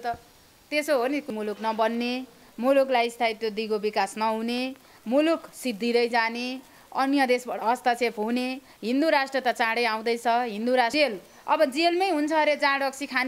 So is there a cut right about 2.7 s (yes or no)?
no